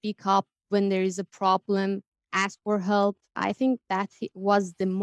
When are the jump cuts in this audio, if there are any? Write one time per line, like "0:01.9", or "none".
0:03.3